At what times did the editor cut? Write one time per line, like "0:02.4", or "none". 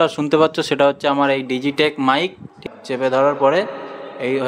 0:02.5